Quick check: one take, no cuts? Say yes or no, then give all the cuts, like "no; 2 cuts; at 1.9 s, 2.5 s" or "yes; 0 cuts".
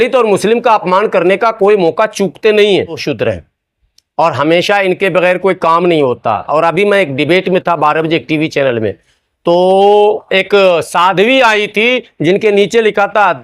no; 1 cut; at 3.0 s